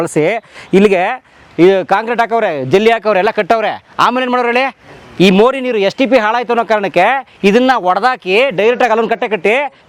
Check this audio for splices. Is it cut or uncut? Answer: uncut